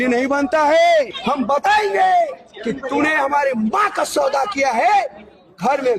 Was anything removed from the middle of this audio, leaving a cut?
yes; 1 cut; at 1.2 s

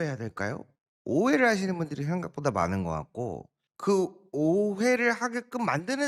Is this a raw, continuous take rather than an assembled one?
yes; 0 cuts

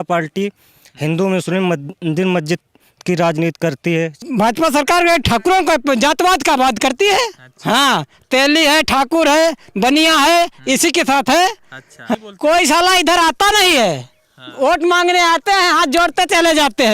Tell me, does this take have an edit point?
yes; 2 cuts; at 4.2 s, 12.1 s

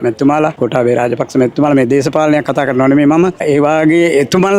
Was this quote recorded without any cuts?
yes; 0 cuts

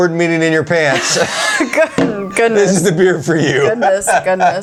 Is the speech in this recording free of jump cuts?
yes; 0 cuts

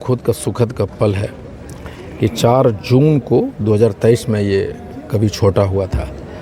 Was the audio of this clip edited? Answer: no; 0 cuts

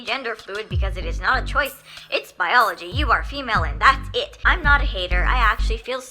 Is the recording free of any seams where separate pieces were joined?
no; 1 cut; at 4.4 s

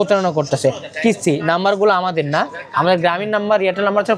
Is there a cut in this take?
no; 0 cuts

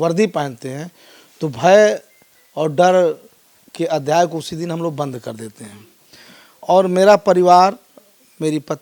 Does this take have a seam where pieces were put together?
no; 0 cuts

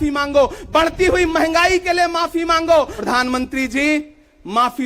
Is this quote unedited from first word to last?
no; 1 cut; at 2.9 s

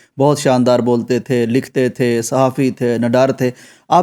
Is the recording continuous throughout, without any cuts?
yes; 0 cuts

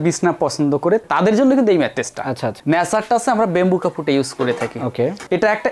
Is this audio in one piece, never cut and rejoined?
no; 1 cut; at 2.5 s

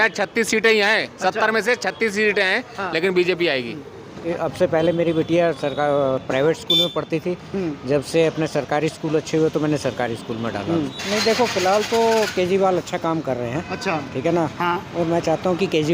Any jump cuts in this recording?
yes; 2 cuts; at 4.3 s, 11.0 s

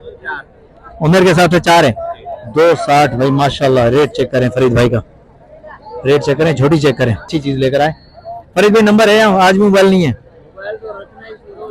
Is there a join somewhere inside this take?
no; 0 cuts

